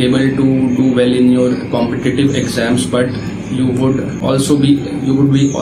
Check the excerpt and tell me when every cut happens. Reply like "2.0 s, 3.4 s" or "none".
4.2 s